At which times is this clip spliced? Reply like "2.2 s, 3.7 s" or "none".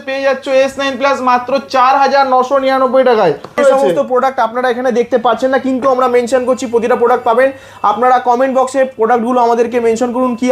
3.6 s

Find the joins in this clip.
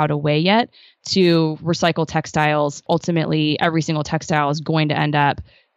2.8 s

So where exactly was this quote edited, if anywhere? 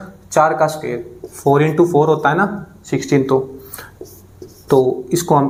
none

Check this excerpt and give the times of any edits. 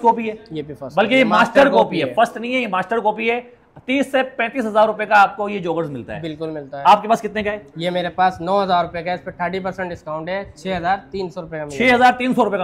none

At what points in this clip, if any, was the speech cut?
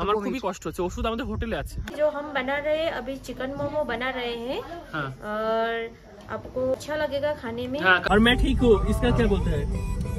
1.9 s, 6.7 s, 8.0 s

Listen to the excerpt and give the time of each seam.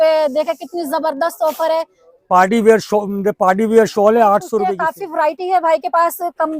4.7 s

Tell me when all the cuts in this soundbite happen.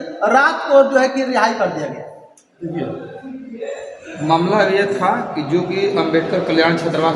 none

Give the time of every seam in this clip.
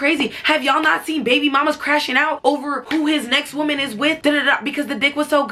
none

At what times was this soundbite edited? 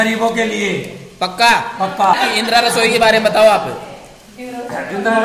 2.1 s

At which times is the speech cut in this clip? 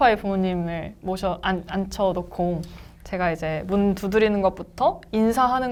none

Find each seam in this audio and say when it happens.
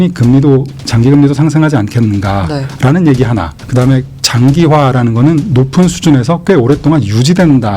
3.6 s

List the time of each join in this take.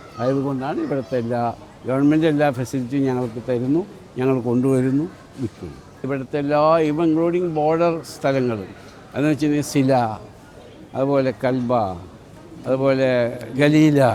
none

